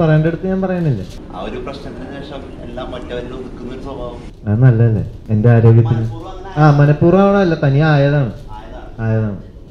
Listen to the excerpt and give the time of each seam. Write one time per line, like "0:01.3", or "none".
0:01.2
0:04.3
0:05.1